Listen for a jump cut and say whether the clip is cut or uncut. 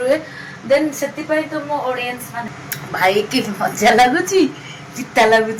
cut